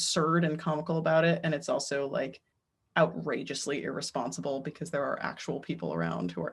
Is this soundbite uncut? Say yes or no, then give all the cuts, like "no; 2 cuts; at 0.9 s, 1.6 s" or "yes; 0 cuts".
yes; 0 cuts